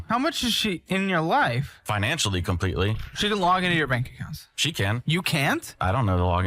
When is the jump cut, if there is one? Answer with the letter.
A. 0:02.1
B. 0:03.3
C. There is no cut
C